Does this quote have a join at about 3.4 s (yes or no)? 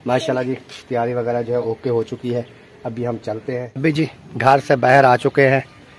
yes